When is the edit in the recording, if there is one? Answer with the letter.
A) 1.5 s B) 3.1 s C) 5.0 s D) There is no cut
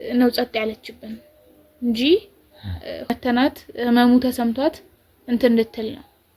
B